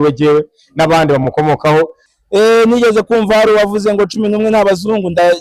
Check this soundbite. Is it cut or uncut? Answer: cut